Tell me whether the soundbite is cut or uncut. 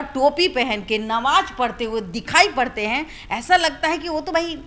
uncut